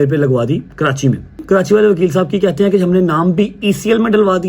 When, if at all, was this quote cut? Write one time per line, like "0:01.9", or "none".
0:01.4